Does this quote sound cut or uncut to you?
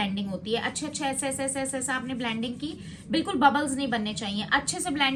uncut